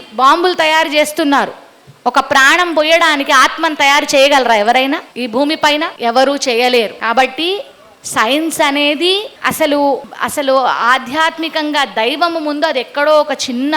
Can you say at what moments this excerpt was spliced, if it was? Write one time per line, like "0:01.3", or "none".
0:05.1
0:05.9
0:07.0
0:09.3
0:10.1